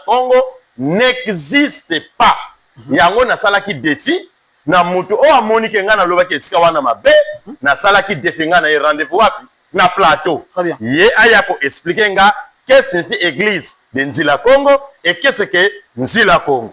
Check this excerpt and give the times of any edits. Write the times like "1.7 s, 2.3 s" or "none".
none